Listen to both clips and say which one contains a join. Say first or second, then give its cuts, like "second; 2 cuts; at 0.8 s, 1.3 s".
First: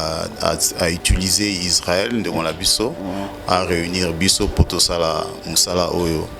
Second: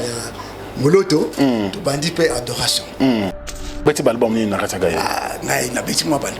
second; 1 cut; at 3.8 s